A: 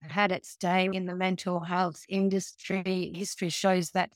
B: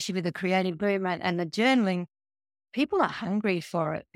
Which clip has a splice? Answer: A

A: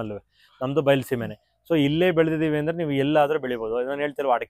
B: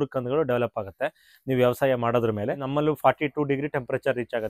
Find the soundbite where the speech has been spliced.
B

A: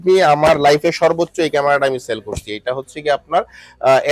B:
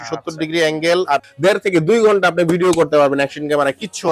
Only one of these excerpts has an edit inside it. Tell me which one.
B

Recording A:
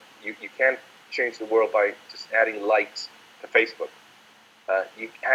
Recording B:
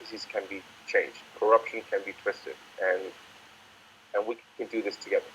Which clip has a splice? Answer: B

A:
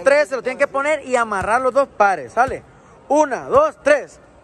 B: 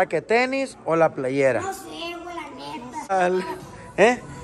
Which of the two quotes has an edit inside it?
B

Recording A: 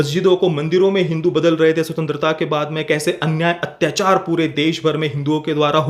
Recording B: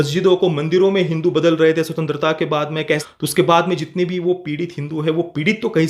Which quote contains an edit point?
B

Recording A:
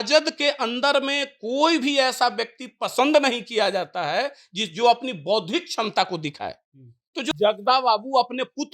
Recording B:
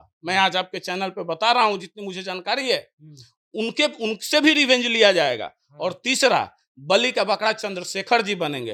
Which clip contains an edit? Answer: A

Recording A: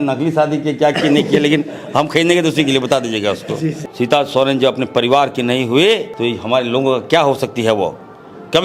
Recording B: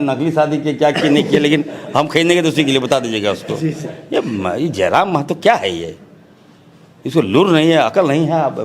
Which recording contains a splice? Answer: A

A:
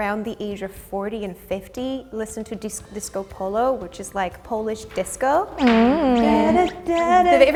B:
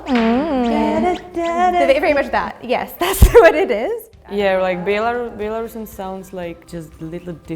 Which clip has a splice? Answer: B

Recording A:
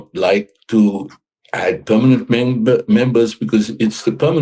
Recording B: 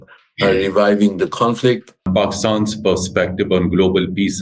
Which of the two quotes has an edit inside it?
B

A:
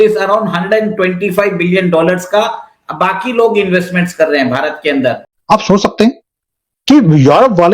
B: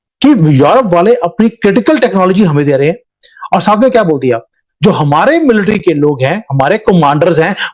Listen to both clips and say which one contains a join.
A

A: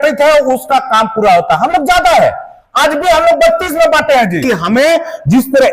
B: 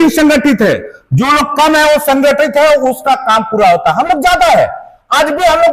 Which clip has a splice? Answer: A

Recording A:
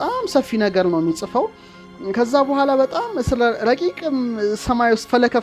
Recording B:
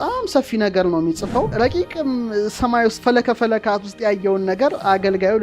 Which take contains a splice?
B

